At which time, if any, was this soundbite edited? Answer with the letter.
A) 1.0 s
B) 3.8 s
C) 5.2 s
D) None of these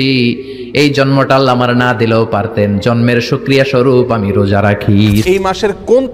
C